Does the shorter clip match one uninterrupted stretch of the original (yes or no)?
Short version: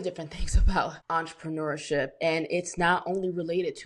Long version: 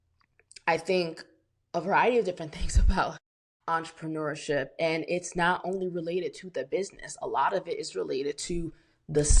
no